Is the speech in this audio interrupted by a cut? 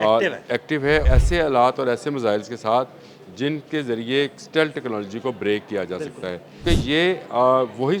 yes; 2 cuts; at 1.0 s, 6.6 s

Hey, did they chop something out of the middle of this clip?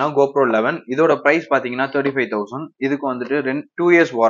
no; 0 cuts

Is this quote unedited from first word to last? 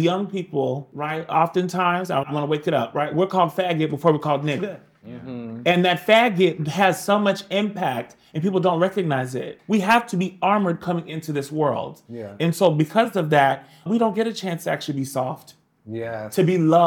no; 2 cuts; at 0.9 s, 9.6 s

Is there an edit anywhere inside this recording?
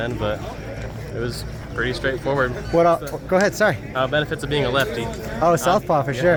no; 0 cuts

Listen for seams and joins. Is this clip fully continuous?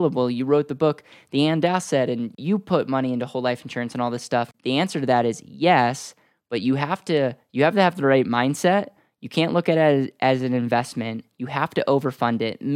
no; 2 cuts; at 2.4 s, 4.5 s

